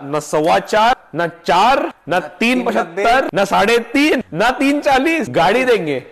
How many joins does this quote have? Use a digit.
5